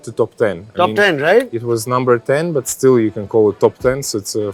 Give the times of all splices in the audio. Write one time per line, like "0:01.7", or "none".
none